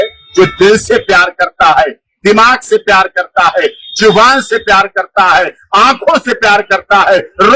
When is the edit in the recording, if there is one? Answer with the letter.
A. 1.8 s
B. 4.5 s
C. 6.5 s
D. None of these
D